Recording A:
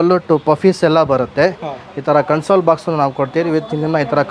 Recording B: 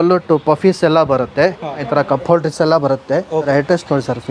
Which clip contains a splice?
B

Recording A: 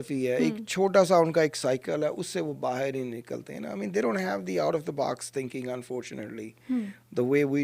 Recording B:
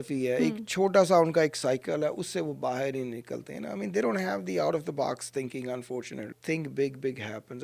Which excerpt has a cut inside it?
B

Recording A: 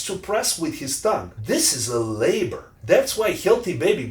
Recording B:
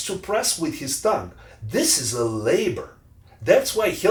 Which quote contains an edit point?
A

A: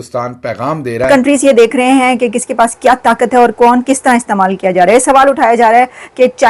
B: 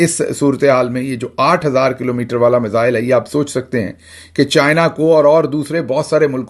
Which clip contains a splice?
A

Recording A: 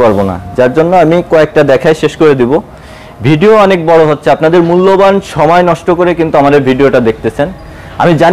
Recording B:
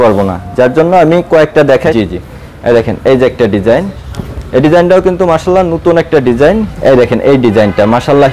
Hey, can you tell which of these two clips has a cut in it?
B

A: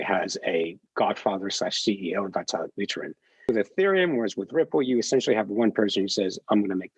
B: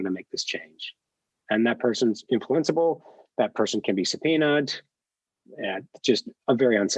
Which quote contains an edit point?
A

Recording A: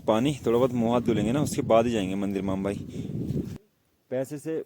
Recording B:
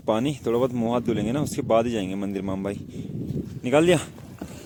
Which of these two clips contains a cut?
A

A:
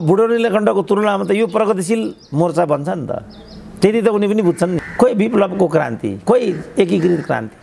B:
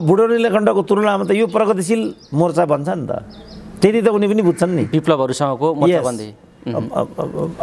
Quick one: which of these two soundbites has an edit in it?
A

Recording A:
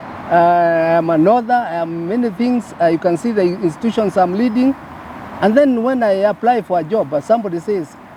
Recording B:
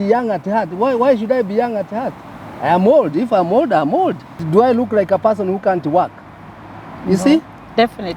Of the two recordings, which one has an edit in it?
B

